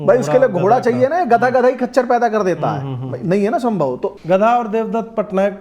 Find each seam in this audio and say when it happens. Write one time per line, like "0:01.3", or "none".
0:04.1